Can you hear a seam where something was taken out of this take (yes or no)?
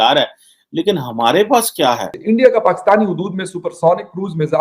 yes